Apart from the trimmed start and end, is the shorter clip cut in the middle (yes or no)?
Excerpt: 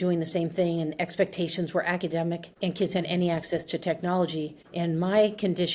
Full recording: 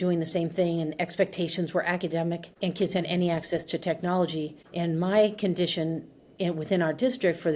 no